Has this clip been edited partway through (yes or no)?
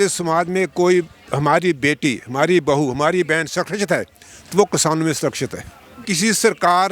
yes